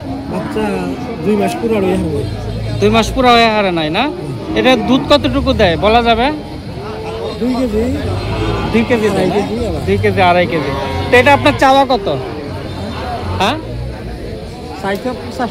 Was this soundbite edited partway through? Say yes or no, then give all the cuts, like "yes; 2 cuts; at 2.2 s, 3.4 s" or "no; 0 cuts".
no; 0 cuts